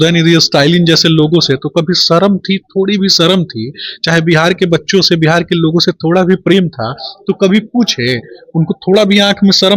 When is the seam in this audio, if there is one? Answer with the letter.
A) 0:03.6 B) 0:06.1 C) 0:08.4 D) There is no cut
D